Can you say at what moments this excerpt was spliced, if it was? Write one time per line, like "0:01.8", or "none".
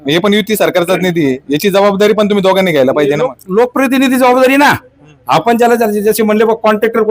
none